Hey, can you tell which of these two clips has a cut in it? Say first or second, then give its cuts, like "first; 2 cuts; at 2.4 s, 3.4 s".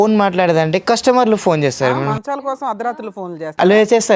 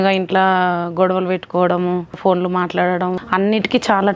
second; 2 cuts; at 2.2 s, 3.2 s